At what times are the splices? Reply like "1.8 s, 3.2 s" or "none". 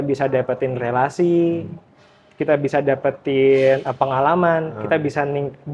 none